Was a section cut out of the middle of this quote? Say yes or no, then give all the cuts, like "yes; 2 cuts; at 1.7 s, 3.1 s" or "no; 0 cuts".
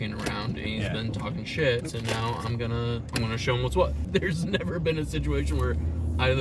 yes; 3 cuts; at 1.9 s, 3.1 s, 4.0 s